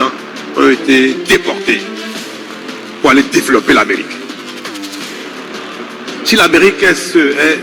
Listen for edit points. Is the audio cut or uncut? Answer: cut